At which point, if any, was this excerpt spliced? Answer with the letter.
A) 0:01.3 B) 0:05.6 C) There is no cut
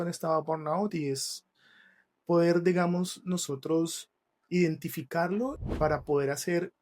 B